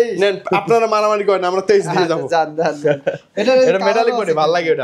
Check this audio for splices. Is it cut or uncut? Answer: uncut